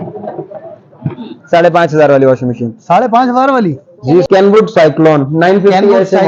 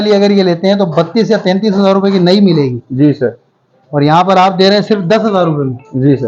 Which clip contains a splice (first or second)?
first